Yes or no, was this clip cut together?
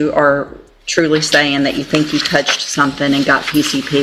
no